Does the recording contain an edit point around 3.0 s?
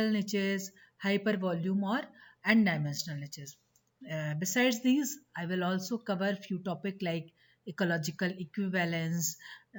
no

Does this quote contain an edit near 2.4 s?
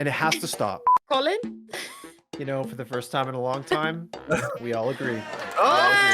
no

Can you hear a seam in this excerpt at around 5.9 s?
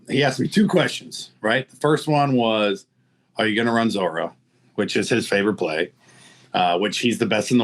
no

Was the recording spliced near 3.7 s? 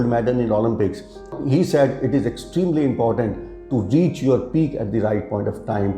no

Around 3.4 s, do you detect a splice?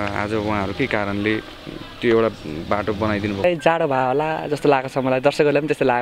yes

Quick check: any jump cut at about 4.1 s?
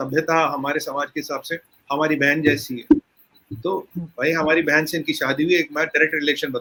no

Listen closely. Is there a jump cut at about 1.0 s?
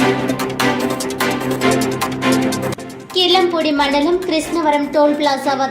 no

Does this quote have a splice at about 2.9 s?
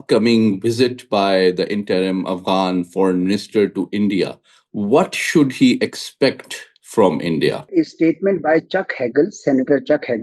no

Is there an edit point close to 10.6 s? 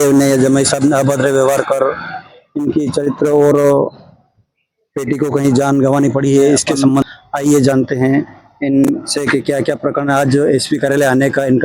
no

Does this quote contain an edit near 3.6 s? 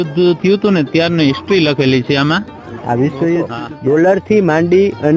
yes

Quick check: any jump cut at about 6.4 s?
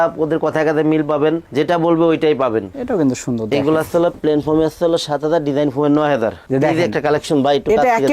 yes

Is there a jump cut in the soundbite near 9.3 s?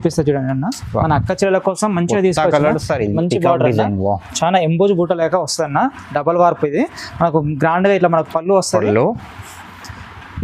no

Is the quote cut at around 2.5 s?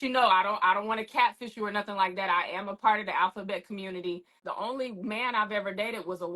no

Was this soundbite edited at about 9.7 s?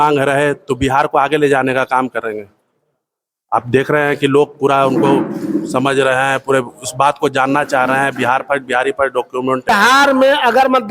yes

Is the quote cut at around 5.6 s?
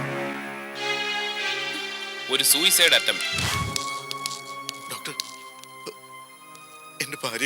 no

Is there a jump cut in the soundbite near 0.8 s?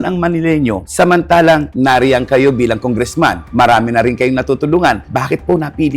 yes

